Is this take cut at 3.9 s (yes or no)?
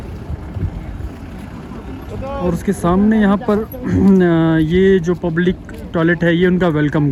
no